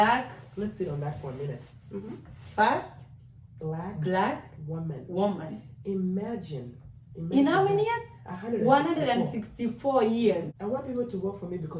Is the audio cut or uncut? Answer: cut